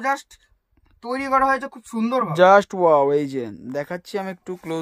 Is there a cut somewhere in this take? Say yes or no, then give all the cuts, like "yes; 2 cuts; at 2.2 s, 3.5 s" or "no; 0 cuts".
no; 0 cuts